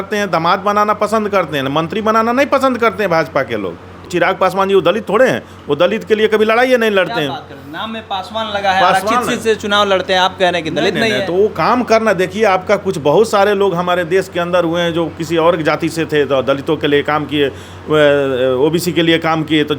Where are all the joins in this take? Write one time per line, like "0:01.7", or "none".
0:04.1

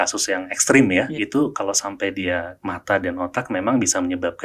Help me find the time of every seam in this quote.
0:01.1
0:02.6

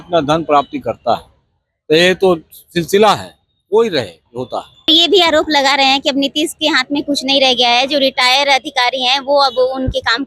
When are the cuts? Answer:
0:04.9

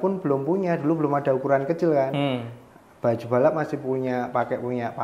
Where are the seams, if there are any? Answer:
none

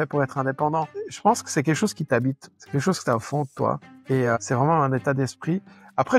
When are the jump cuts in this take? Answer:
0:01.0
0:02.5
0:03.9

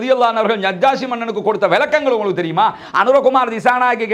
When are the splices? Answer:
none

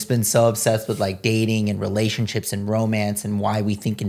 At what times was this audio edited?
none

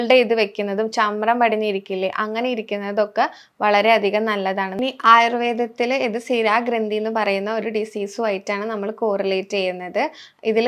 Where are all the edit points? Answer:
0:04.7

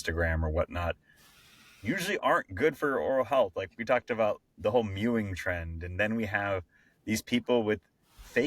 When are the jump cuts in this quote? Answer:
none

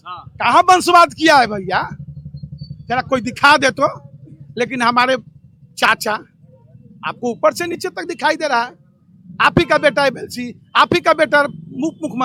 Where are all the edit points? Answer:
none

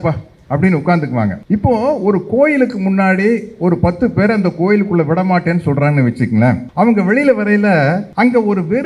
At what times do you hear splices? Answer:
0:01.4
0:06.7
0:08.1

